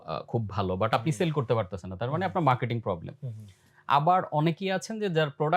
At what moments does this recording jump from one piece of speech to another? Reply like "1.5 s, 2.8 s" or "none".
none